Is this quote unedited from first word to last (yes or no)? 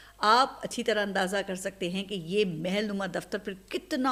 yes